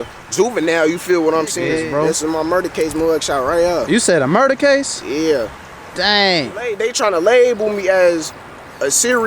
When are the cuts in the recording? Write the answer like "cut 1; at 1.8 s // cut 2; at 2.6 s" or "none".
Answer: cut 1; at 1.8 s // cut 2; at 6.8 s